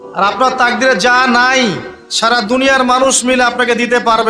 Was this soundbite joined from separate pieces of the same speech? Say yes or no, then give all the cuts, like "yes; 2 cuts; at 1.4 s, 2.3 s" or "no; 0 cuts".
no; 0 cuts